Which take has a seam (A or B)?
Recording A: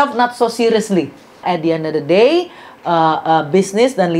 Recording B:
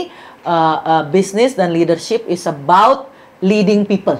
A